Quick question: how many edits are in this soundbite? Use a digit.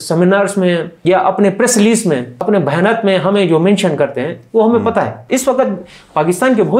3